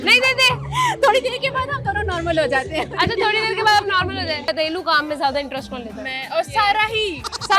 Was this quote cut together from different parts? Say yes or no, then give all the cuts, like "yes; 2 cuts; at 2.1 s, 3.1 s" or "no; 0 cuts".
yes; 1 cut; at 4.5 s